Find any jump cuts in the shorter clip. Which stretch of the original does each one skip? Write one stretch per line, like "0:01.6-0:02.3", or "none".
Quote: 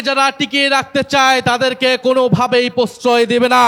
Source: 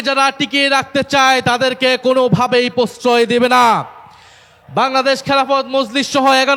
none